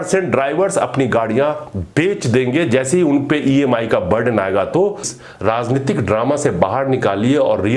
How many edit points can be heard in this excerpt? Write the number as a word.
one